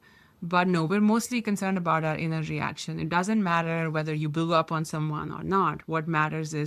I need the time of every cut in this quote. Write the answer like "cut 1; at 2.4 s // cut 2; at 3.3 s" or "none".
none

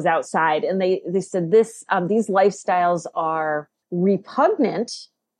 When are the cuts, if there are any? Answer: cut 1; at 3.8 s

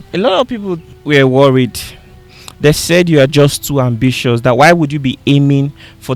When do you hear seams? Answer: cut 1; at 0.9 s

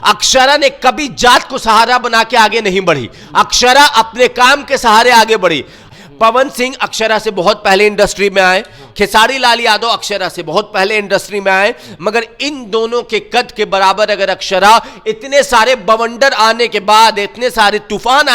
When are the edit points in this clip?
cut 1; at 5.8 s

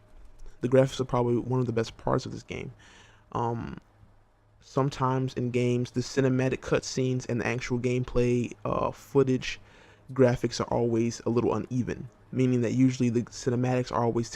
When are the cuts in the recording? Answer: cut 1; at 4.9 s

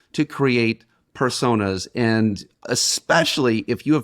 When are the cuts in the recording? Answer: cut 1; at 2.5 s

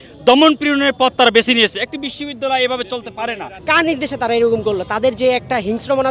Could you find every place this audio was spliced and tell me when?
cut 1; at 3.5 s

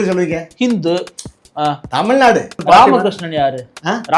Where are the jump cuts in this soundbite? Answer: cut 1; at 2.6 s

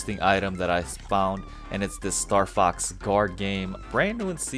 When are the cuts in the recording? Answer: none

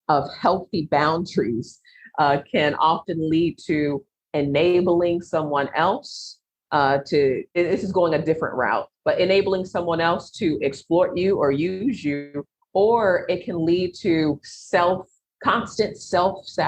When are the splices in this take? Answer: none

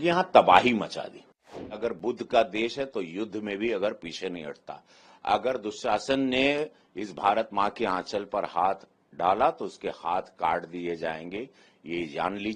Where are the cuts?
cut 1; at 1.8 s

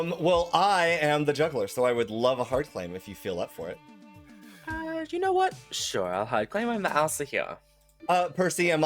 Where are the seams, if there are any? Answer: cut 1; at 7.9 s

